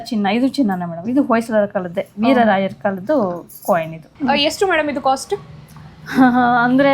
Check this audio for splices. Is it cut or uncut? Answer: cut